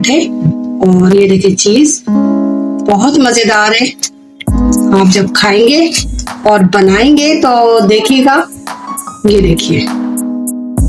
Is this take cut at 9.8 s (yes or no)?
yes